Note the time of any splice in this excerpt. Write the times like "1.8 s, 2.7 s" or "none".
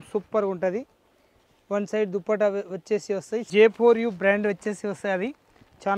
3.5 s